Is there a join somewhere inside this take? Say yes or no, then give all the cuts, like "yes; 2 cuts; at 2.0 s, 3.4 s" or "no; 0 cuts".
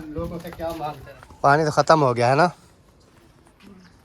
yes; 1 cut; at 1.1 s